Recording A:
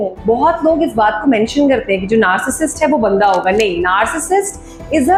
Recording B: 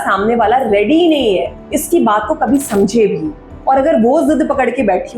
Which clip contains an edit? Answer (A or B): B